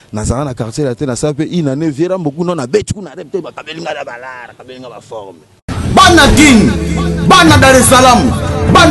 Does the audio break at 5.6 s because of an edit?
yes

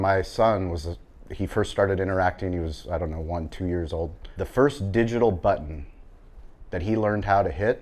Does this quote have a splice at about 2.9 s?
no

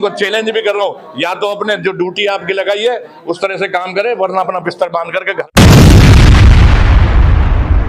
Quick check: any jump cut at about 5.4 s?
yes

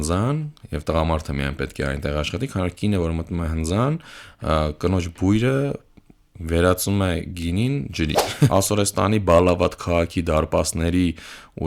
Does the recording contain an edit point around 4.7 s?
no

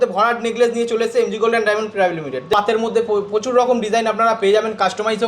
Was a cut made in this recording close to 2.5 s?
yes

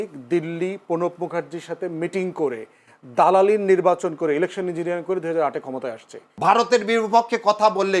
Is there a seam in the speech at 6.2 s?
yes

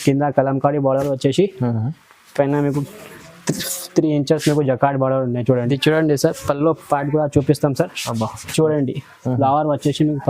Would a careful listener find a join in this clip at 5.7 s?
yes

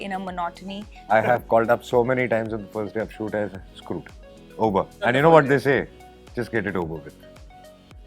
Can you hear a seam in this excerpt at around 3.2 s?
no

